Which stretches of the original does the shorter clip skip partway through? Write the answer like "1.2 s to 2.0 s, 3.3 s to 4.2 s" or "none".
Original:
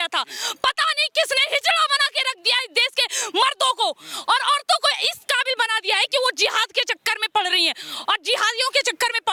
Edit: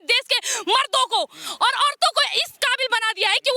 none